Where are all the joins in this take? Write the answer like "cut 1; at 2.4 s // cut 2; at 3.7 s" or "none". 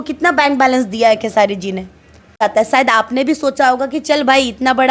cut 1; at 2.3 s